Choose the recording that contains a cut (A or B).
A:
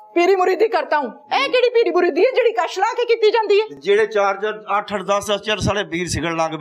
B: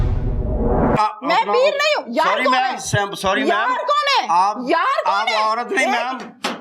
B